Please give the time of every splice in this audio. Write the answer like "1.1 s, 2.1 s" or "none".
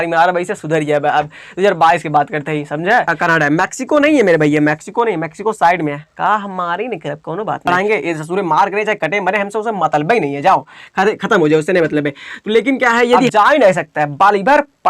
3.1 s, 7.7 s, 13.3 s